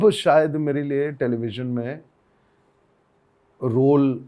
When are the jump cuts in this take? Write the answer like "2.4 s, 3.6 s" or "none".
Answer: none